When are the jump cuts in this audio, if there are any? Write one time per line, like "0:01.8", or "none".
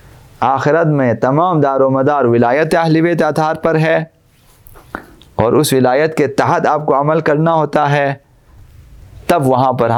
none